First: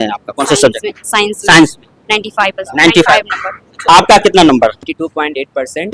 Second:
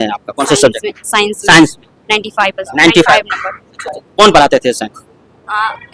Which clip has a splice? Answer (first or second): first